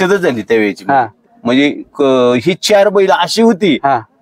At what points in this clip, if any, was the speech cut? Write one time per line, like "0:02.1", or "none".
none